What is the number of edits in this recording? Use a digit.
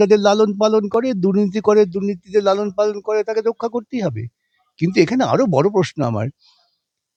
0